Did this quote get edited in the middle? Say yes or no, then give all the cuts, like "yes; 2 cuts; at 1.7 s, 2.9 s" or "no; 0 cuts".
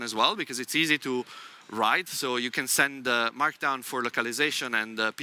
no; 0 cuts